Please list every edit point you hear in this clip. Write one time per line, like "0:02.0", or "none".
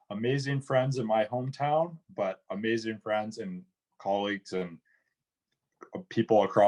none